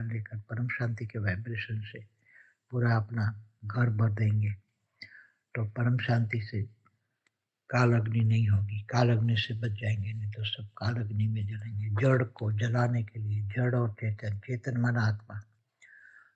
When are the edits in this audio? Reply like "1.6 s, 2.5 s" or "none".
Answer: none